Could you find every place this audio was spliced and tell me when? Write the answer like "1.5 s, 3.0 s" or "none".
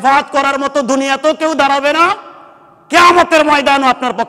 none